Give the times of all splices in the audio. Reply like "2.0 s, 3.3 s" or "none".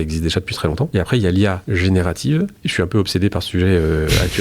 0.9 s, 1.6 s, 2.6 s